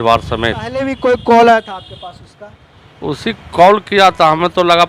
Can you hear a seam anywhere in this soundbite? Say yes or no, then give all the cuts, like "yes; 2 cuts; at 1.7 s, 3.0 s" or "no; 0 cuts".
yes; 1 cut; at 0.9 s